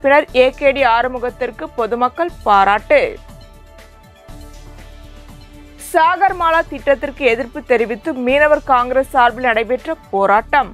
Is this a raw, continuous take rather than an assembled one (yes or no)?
no